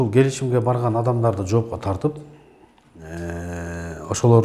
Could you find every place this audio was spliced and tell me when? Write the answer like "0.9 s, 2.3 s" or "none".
none